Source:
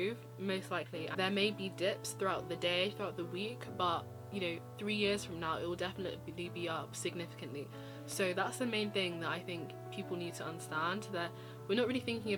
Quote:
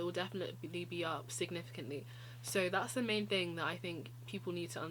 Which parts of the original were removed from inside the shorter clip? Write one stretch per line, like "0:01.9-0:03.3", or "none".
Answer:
none